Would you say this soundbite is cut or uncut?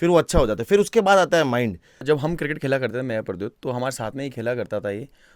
cut